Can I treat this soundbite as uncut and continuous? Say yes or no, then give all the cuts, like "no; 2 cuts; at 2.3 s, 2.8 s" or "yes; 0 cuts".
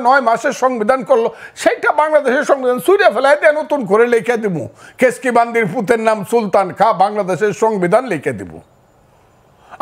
yes; 0 cuts